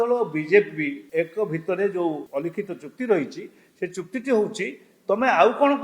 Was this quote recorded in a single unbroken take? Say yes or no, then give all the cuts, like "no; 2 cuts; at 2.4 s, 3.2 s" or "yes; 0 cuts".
no; 2 cuts; at 1.0 s, 2.2 s